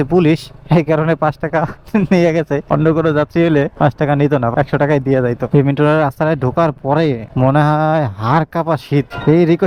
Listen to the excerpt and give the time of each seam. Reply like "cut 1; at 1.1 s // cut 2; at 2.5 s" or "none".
none